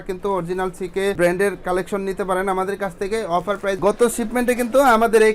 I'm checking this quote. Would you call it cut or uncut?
cut